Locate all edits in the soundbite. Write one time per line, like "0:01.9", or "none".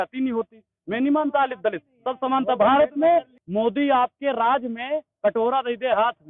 0:03.3

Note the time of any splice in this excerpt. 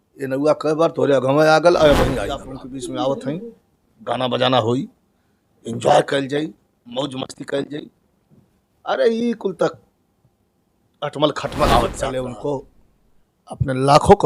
0:02.5
0:12.1

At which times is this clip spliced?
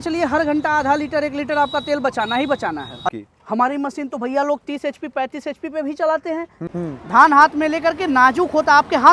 0:03.1
0:06.6

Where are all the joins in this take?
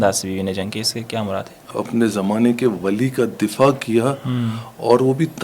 0:01.7

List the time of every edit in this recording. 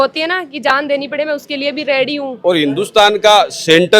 0:02.3

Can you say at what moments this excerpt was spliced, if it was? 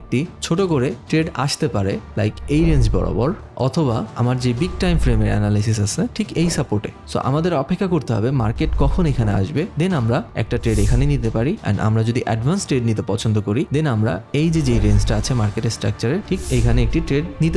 none

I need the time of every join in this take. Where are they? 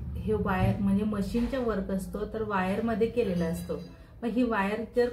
none

